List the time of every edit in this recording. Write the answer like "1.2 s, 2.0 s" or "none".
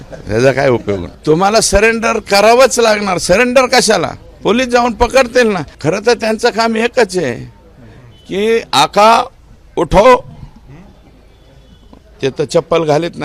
1.1 s, 5.7 s